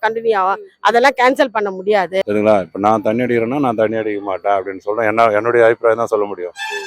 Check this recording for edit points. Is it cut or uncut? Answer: cut